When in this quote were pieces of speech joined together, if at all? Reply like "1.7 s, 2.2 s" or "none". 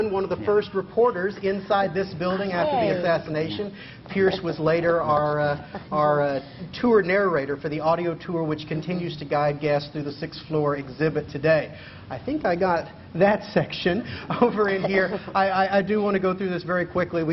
8.3 s